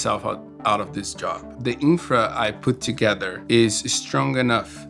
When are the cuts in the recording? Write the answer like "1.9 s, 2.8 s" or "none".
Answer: 1.5 s